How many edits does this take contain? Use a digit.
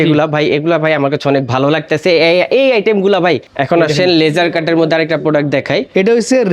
1